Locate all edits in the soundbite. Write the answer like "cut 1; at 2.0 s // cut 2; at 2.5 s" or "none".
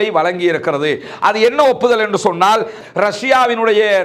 cut 1; at 2.8 s

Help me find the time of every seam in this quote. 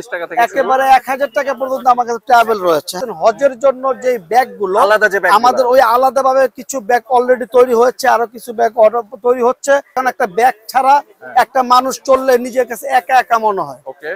cut 1; at 3.0 s // cut 2; at 10.0 s

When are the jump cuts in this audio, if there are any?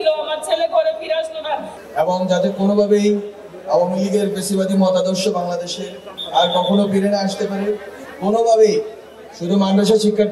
cut 1; at 1.8 s

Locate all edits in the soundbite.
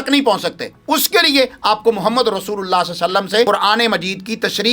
cut 1; at 3.5 s

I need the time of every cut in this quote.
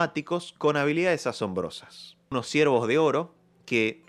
cut 1; at 2.3 s

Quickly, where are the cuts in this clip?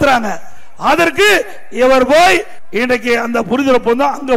cut 1; at 2.6 s

